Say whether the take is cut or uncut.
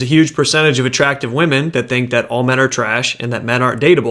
uncut